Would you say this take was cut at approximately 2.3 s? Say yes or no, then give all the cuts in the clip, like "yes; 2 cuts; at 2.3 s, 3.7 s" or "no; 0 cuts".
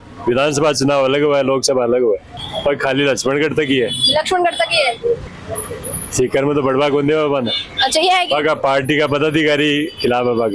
yes; 2 cuts; at 2.3 s, 5.3 s